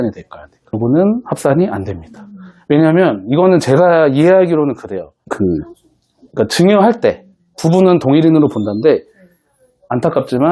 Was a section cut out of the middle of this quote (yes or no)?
yes